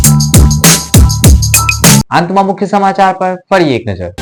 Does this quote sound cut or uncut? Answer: uncut